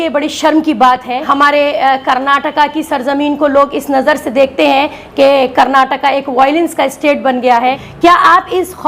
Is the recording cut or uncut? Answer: cut